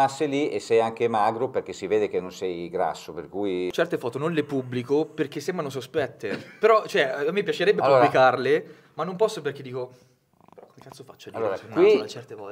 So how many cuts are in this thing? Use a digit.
1